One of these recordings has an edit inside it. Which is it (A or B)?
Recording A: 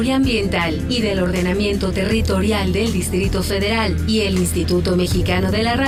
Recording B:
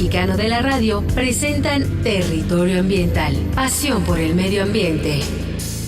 B